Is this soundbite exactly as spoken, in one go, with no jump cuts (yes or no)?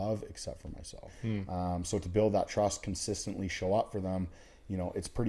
no